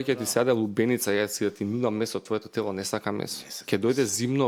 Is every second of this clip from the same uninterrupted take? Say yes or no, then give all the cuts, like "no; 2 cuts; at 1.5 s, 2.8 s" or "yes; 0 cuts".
yes; 0 cuts